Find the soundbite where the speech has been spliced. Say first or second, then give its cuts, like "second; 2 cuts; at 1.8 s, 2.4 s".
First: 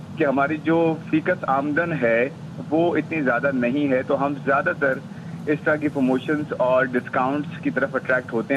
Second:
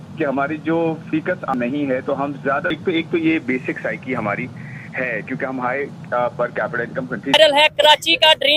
second; 3 cuts; at 1.5 s, 2.7 s, 7.3 s